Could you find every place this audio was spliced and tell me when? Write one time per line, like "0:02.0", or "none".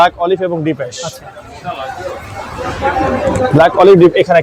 none